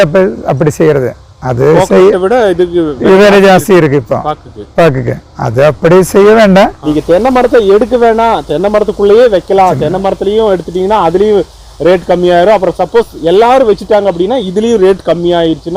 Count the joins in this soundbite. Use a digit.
1